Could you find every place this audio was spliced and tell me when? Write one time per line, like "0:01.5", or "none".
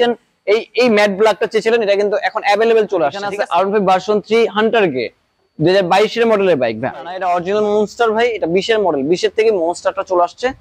0:03.3
0:07.1